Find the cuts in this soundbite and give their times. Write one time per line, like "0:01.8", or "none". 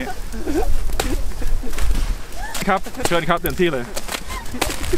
0:02.6